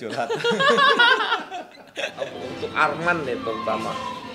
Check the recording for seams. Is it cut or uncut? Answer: cut